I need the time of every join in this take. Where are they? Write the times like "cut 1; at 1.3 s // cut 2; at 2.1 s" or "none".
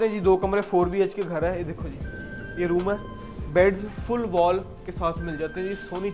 none